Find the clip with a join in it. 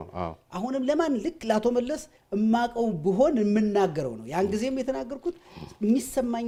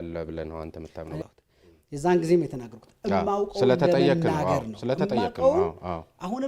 second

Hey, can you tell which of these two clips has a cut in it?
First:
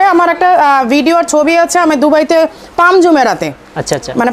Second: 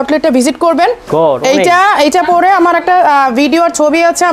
second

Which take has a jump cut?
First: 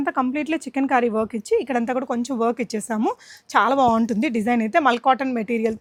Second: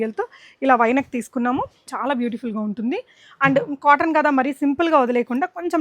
second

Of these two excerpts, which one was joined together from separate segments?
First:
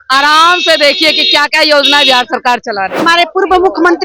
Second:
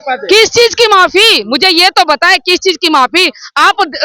first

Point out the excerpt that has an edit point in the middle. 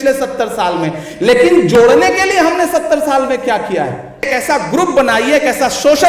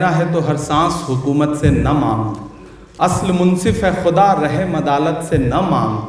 first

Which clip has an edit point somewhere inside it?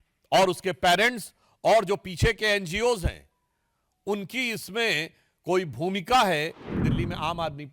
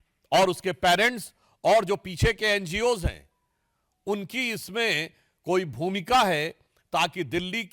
first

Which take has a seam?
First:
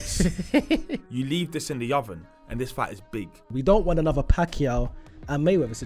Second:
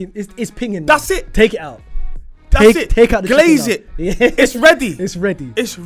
first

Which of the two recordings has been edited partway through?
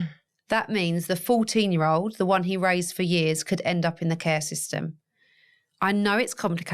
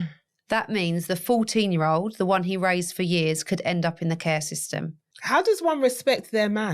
second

